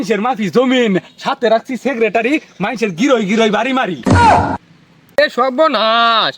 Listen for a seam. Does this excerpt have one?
yes; 1 cut; at 5.0 s

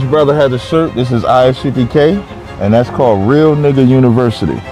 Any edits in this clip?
no; 0 cuts

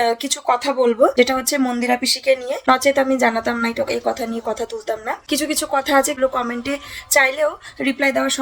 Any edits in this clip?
yes; 3 cuts; at 2.6 s, 5.1 s, 6.2 s

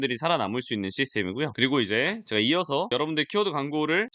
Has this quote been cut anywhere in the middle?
yes; 1 cut; at 1.5 s

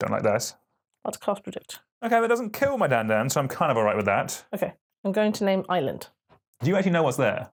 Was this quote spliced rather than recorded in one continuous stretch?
no; 0 cuts

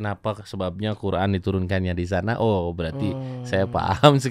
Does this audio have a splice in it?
no; 0 cuts

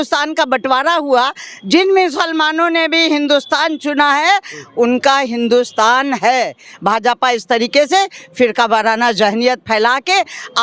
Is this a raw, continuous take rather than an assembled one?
yes; 0 cuts

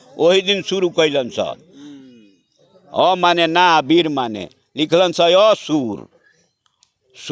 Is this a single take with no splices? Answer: yes; 0 cuts

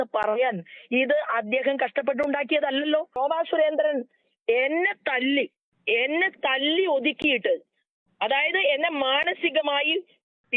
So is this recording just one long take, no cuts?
no; 1 cut; at 3.2 s

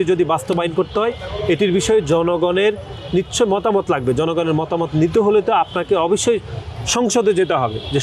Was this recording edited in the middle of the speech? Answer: no; 0 cuts

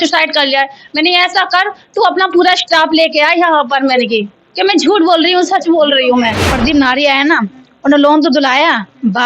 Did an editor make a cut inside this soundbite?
yes; 1 cut; at 6.5 s

